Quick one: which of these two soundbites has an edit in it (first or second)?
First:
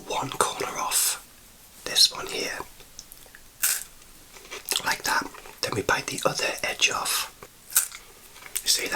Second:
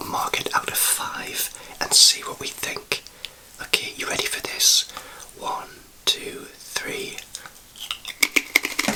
first